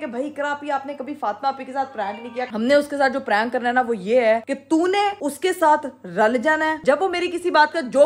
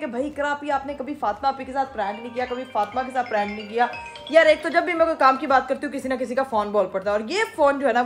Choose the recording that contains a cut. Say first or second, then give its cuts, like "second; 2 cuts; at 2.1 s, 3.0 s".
first; 2 cuts; at 2.5 s, 6.8 s